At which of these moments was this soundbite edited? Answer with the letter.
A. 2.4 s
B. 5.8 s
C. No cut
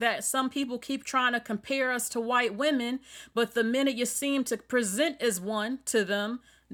C